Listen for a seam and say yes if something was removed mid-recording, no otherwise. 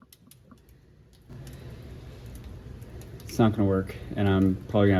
no